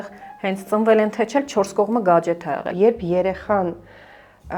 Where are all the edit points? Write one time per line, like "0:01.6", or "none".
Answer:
0:02.7